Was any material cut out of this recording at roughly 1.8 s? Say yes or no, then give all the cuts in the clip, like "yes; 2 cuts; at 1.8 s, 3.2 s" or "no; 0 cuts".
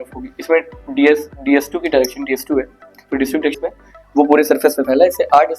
no; 1 cut; at 3.6 s